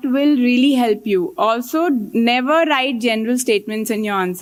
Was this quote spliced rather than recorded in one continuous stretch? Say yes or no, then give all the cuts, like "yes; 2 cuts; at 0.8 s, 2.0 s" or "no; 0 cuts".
no; 0 cuts